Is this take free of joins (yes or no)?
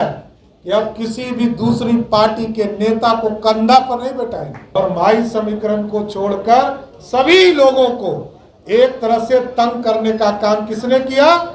no